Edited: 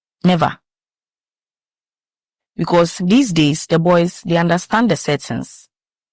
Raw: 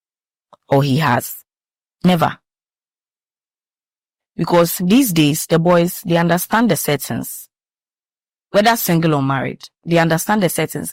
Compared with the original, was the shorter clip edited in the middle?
no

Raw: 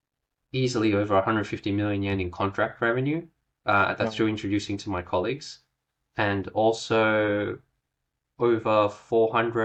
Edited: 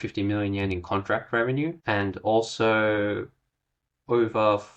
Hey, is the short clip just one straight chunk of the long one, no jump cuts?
no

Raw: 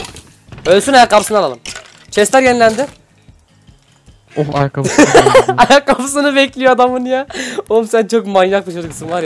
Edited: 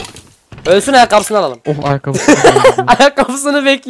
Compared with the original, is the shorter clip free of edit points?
no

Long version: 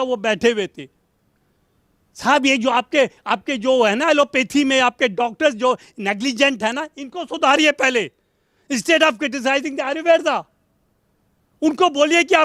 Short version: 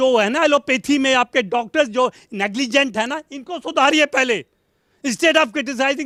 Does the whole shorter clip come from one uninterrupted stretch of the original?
yes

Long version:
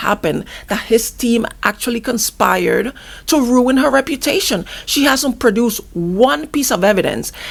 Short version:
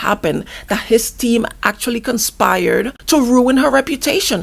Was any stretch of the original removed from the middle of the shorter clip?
yes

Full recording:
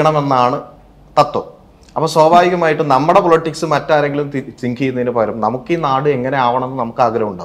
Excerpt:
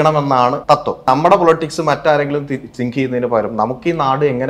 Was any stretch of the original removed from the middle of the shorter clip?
yes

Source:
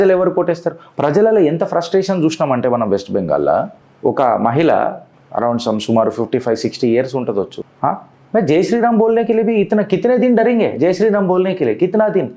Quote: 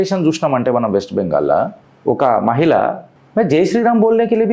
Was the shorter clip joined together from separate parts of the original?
yes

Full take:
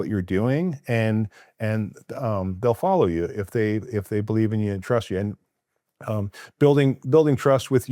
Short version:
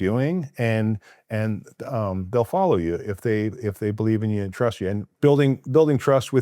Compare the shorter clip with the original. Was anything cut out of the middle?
yes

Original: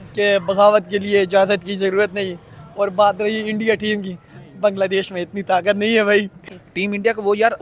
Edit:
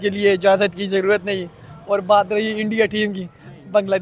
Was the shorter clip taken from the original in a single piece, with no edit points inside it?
yes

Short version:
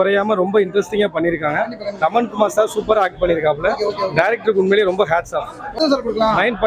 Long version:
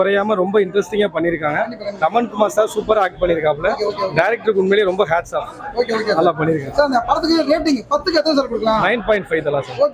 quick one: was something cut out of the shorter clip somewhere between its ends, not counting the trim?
yes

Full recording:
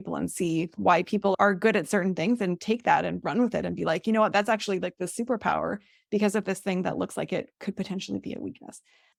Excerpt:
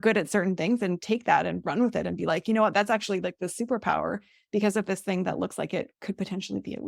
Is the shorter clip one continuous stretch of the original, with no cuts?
yes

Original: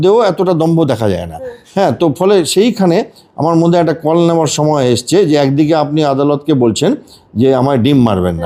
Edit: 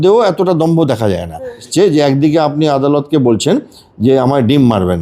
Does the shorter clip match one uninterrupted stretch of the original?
no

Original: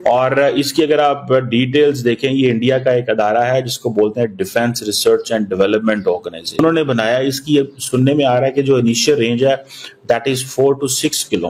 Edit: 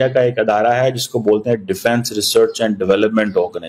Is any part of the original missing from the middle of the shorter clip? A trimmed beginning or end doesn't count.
no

